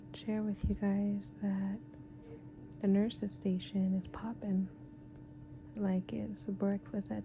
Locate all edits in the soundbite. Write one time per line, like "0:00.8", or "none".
none